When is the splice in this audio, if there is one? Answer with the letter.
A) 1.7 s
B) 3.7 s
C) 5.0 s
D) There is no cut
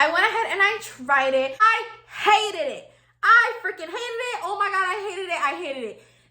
A